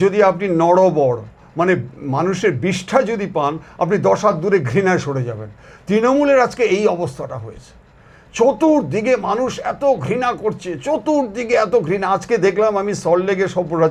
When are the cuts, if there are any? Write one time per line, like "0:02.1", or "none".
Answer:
none